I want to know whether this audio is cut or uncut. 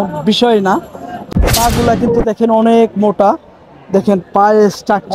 cut